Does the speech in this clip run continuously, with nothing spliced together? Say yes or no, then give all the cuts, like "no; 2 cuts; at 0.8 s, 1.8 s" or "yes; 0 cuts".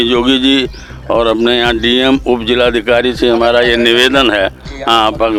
yes; 0 cuts